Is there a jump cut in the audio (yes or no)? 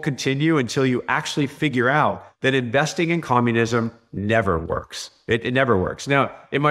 no